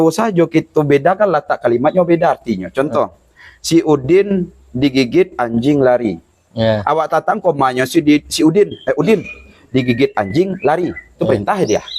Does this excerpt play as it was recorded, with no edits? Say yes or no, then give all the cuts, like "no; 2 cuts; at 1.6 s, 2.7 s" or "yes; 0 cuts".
yes; 0 cuts